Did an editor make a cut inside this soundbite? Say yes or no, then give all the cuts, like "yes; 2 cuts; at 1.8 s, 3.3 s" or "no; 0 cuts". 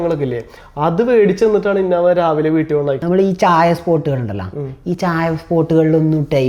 yes; 1 cut; at 3.0 s